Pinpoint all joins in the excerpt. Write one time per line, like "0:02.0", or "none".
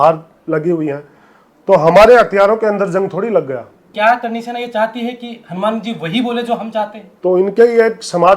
0:03.8
0:07.0